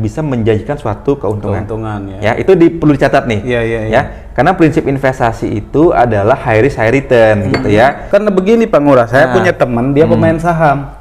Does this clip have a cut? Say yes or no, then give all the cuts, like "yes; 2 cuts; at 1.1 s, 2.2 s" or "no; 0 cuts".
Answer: yes; 1 cut; at 8.0 s